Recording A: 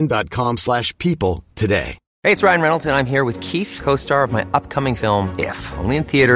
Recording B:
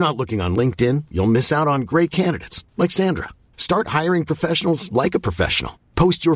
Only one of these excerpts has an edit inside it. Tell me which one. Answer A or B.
A